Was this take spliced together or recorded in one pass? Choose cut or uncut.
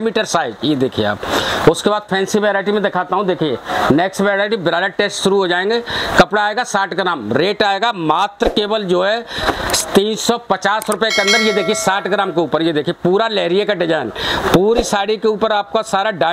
uncut